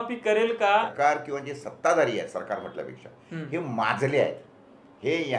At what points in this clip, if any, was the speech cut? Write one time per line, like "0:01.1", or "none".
0:00.9